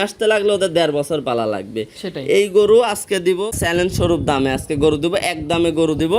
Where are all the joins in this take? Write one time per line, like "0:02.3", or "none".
0:03.5